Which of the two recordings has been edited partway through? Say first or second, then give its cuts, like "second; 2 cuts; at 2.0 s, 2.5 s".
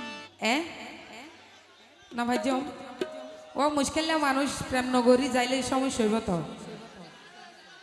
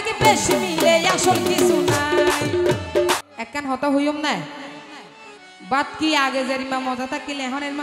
second; 1 cut; at 3.2 s